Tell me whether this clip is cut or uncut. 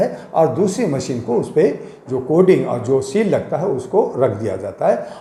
uncut